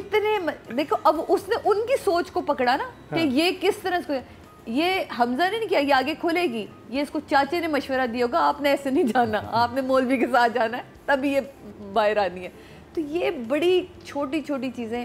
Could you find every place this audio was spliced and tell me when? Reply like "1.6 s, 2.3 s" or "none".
none